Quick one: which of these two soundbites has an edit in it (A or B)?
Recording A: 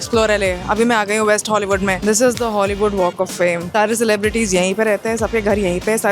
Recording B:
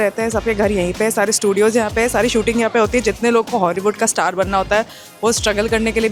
A